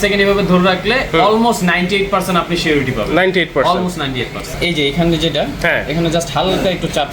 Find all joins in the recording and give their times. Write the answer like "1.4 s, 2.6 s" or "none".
4.5 s